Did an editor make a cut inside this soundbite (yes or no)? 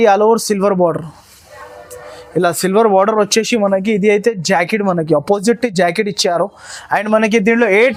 no